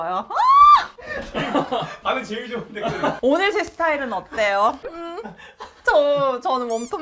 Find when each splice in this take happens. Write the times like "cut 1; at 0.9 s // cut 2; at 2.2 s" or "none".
none